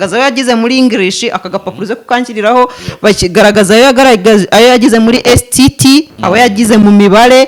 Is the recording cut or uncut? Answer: uncut